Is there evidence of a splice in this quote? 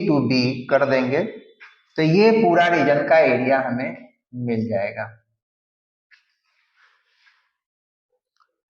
no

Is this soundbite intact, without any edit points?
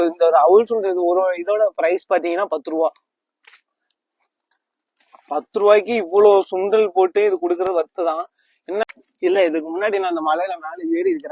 no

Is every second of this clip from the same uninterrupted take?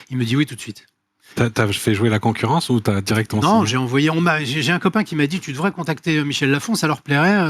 yes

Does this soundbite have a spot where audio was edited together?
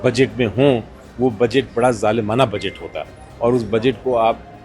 no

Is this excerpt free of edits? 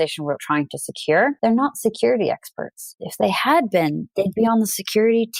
no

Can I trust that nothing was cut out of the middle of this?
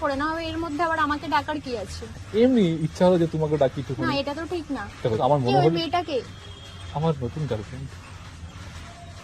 no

